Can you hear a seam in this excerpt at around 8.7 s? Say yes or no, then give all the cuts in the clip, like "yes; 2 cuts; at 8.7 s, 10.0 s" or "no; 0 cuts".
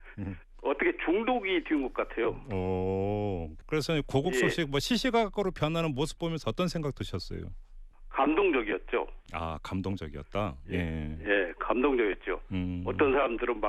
no; 1 cut; at 6.7 s